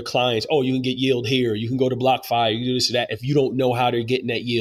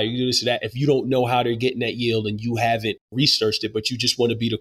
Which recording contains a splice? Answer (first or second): second